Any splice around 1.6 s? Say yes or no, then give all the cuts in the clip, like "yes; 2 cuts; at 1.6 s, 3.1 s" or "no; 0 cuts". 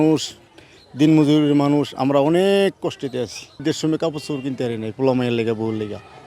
no; 1 cut; at 3.6 s